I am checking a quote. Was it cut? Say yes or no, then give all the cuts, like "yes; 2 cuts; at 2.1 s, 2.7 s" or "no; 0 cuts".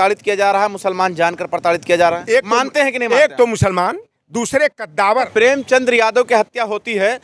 yes; 2 cuts; at 2.2 s, 5.3 s